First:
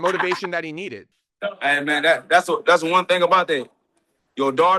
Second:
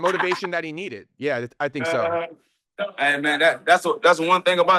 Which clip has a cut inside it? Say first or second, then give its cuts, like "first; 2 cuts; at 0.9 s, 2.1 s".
first; 1 cut; at 1.1 s